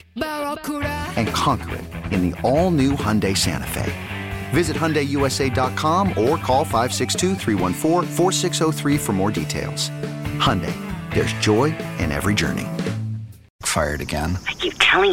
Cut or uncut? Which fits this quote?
cut